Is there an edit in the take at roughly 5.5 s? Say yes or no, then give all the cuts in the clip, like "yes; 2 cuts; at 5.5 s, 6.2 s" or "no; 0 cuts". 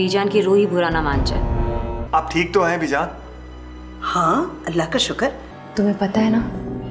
yes; 2 cuts; at 1.9 s, 5.5 s